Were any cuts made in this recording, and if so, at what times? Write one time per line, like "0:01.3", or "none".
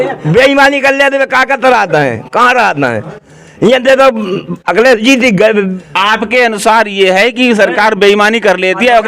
0:05.8

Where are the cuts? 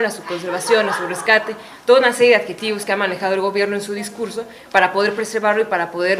none

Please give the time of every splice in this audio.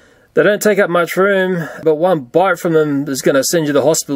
0:01.8

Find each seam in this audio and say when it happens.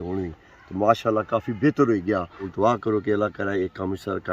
0:02.5

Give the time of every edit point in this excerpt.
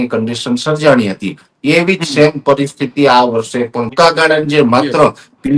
0:03.9

